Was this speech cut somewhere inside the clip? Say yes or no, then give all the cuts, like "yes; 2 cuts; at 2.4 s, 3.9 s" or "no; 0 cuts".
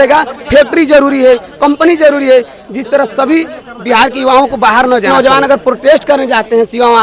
yes; 1 cut; at 5.1 s